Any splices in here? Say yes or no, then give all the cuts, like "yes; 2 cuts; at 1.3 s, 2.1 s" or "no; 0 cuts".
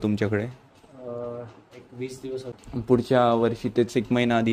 yes; 1 cut; at 2.5 s